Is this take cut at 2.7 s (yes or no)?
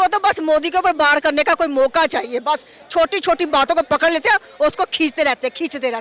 no